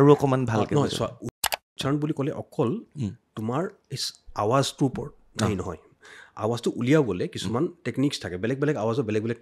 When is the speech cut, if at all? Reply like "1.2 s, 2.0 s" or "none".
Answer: 1.5 s